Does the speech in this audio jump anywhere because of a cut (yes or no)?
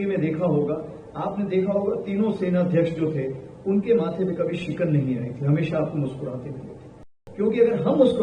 yes